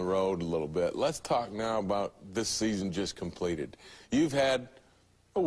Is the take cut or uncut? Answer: cut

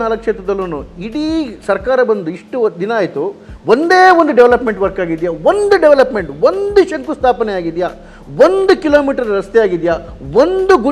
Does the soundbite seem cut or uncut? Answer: uncut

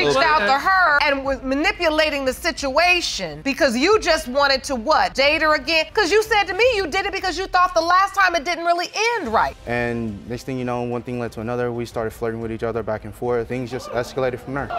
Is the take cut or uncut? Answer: cut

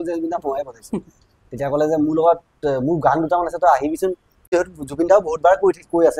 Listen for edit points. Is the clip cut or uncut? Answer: cut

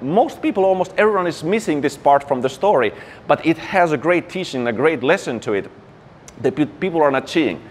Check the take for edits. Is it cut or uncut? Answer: uncut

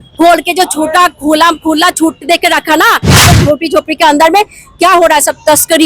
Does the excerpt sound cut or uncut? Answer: cut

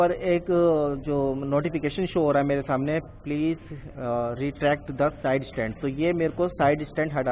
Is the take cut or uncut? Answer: uncut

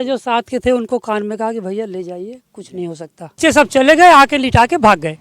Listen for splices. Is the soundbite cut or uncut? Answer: cut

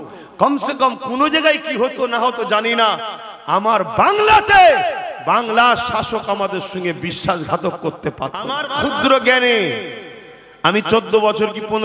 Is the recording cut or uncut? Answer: cut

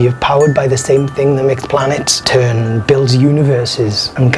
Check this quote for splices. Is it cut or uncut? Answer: cut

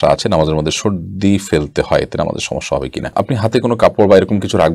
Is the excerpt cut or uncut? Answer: uncut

